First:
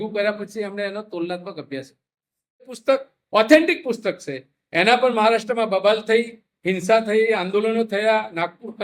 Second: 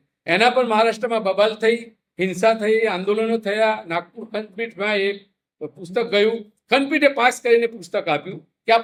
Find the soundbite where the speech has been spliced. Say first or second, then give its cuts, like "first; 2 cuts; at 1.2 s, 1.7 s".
first; 1 cut; at 2.6 s